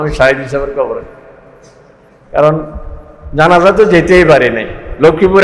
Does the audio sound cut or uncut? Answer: uncut